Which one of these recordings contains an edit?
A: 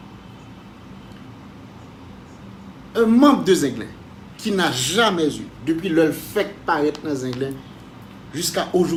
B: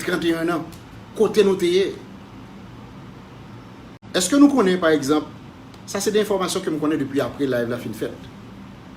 B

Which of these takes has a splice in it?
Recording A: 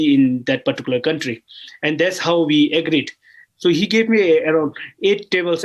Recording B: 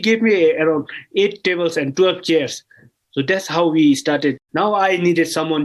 B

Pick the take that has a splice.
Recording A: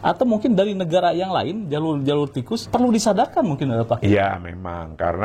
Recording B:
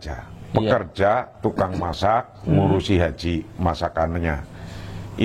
A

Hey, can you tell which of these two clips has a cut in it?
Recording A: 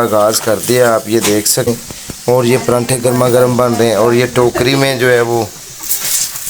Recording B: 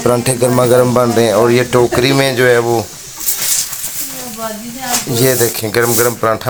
A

